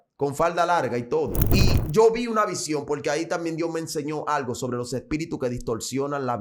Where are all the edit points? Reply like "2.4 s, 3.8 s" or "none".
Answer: 1.4 s